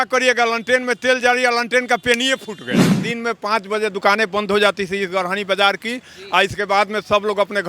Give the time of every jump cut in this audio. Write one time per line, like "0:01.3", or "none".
0:03.0